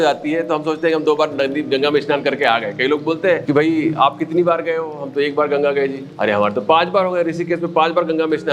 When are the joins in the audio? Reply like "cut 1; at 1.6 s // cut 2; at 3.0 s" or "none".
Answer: cut 1; at 3.4 s